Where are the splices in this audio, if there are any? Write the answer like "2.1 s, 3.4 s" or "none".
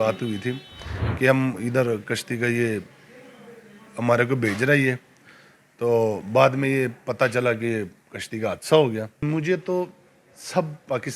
9.2 s